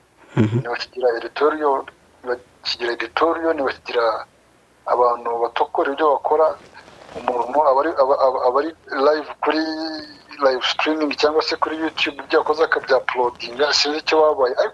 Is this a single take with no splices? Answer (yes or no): yes